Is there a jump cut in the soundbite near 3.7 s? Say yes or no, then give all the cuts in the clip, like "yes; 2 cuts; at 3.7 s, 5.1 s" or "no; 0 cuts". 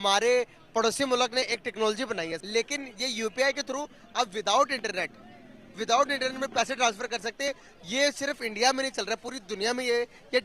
no; 1 cut; at 2.4 s